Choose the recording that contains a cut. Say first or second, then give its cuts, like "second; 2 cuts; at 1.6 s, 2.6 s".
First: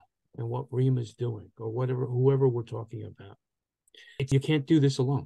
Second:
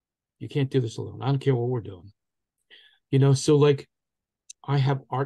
first; 1 cut; at 4.3 s